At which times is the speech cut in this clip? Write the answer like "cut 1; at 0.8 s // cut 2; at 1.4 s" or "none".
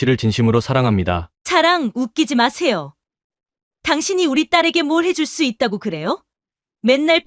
cut 1; at 1.3 s